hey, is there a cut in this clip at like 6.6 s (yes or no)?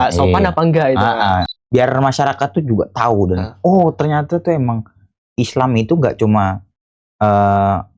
no